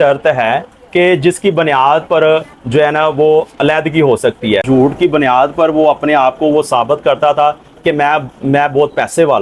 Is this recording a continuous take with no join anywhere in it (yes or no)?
no